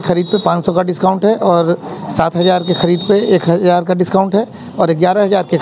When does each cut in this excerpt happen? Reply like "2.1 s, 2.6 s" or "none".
none